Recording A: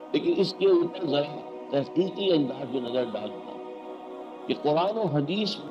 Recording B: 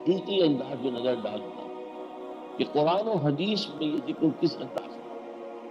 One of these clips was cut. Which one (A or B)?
B